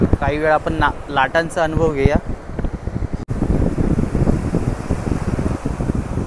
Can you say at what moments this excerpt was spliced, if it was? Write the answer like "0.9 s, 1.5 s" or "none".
3.3 s